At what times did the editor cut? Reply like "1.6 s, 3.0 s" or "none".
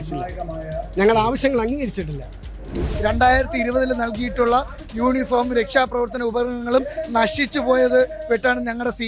2.8 s